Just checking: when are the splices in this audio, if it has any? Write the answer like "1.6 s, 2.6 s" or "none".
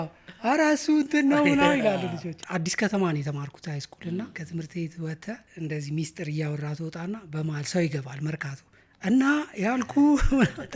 2.4 s, 4.4 s, 5.5 s